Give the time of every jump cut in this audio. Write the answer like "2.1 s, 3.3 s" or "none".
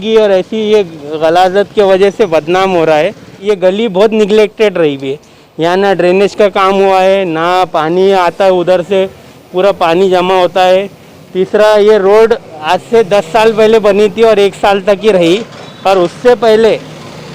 3.3 s